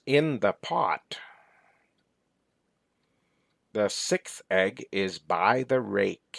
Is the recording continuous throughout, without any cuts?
no; 1 cut; at 2.5 s

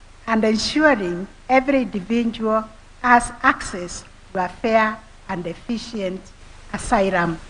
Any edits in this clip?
no; 0 cuts

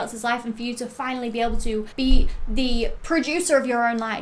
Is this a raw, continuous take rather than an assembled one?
no; 2 cuts; at 1.9 s, 3.0 s

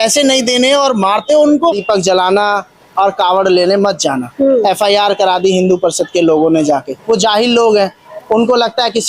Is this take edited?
yes; 1 cut; at 1.8 s

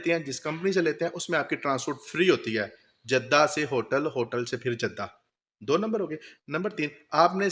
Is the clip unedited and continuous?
yes; 0 cuts

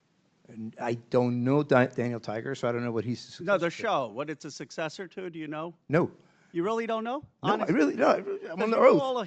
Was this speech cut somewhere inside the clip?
no; 0 cuts

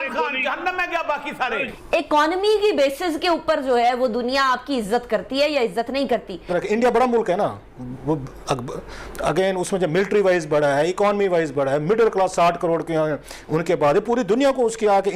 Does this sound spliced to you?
yes; 2 cuts; at 1.7 s, 6.5 s

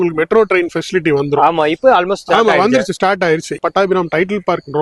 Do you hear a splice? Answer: yes; 1 cut; at 3.6 s

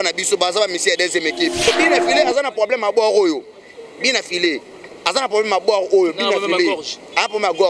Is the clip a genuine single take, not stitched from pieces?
no; 1 cut; at 1.7 s

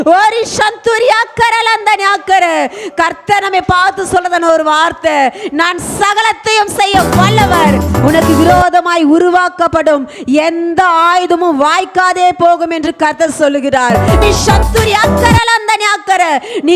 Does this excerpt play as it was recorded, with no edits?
no; 2 cuts; at 7.9 s, 14.2 s

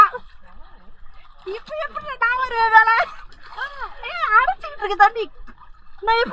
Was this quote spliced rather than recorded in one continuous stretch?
no; 0 cuts

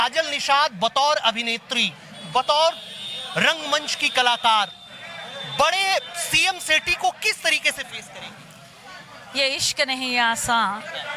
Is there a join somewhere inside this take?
no; 0 cuts

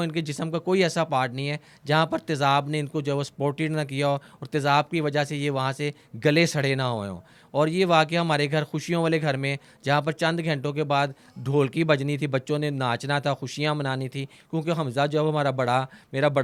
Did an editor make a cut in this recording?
no; 0 cuts

